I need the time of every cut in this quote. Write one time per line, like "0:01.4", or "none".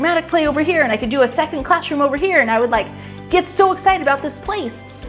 none